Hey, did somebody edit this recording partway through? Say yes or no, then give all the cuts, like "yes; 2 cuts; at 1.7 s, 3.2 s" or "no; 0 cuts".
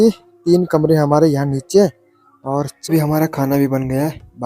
yes; 1 cut; at 2.8 s